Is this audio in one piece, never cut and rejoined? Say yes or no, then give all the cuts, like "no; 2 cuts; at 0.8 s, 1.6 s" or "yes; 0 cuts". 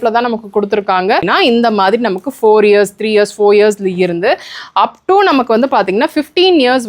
no; 1 cut; at 1.3 s